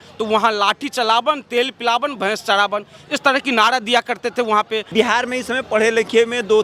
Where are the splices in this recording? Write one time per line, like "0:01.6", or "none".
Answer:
0:04.9